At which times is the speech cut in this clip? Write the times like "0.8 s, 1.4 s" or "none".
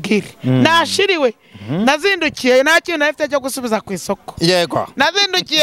none